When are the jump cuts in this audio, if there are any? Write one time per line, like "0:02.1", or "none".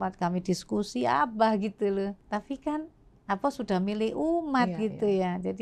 0:02.2